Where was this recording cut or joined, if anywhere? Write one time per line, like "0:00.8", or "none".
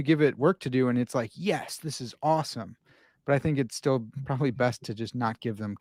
none